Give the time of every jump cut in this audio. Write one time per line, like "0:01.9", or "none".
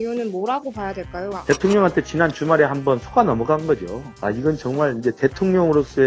0:01.4
0:04.1